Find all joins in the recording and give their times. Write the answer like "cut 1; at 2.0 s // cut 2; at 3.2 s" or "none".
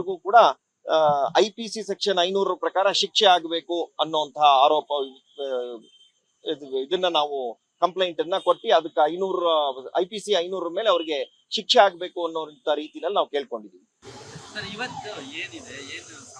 cut 1; at 14.2 s